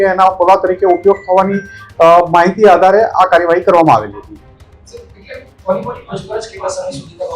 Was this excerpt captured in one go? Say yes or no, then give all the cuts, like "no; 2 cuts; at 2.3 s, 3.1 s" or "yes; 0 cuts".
yes; 0 cuts